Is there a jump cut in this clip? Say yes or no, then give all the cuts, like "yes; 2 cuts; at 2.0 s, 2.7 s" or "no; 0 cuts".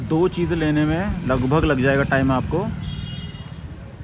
no; 0 cuts